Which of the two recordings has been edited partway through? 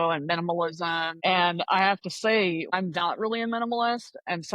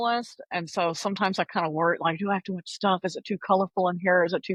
first; 2 cuts; at 1.1 s, 2.7 s

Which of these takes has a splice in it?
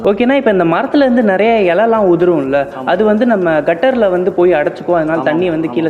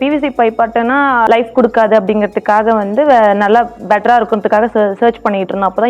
second; 1 cut; at 1.3 s

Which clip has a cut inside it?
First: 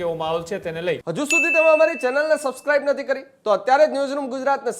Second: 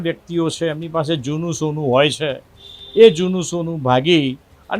first; 1 cut; at 1.1 s

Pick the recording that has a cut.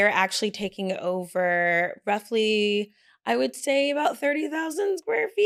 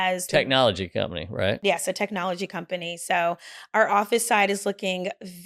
second; 1 cut; at 1.6 s

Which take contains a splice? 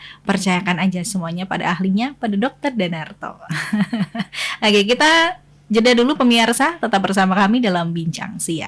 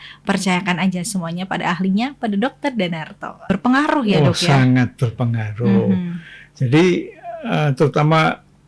second; 1 cut; at 3.4 s

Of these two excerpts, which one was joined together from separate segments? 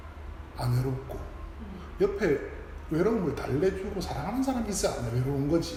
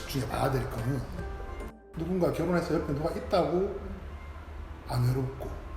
second; 1 cut; at 1.6 s

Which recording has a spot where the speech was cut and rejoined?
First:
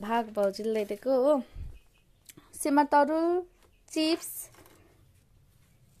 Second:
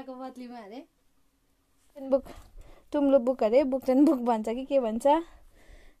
second; 1 cut; at 2.1 s

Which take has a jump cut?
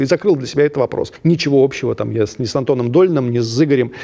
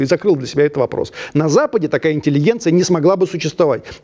first; 1 cut; at 1.1 s

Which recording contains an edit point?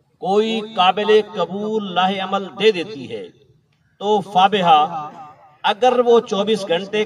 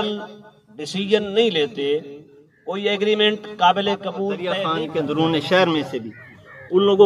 second; 1 cut; at 4.5 s

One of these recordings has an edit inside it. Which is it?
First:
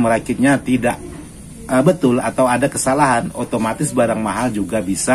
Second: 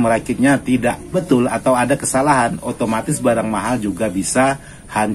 second; 1 cut; at 1.2 s

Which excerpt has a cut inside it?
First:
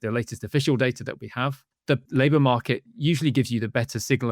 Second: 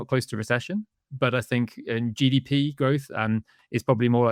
first; 1 cut; at 1.9 s

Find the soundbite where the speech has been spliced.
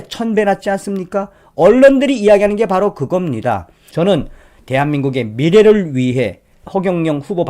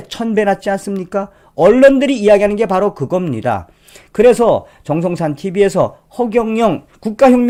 first; 2 cuts; at 3.9 s, 6.6 s

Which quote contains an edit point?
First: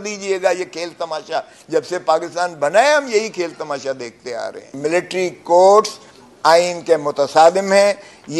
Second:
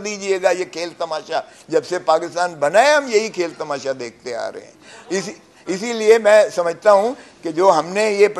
first; 1 cut; at 4.7 s

